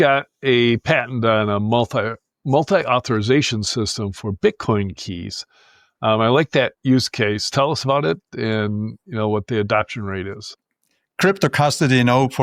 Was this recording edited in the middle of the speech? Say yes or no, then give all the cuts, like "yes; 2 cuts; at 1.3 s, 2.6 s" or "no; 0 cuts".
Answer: no; 0 cuts